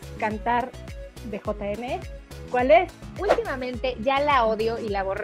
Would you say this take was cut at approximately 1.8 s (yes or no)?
no